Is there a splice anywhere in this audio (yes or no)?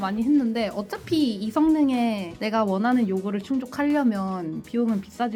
no